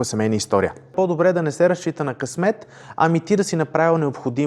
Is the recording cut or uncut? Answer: cut